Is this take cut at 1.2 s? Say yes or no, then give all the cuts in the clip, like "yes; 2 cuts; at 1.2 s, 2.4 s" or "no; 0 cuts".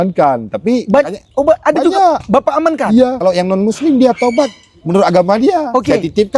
no; 1 cut; at 3.2 s